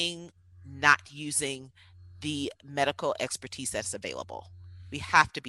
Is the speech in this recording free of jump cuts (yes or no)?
yes